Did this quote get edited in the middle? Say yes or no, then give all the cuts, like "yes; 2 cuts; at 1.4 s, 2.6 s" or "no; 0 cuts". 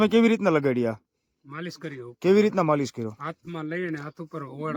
no; 0 cuts